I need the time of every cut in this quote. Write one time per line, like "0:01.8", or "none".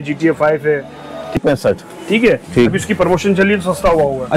0:01.4